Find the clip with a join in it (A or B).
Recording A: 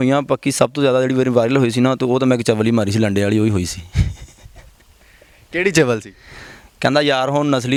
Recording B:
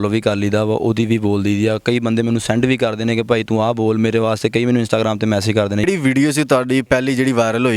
B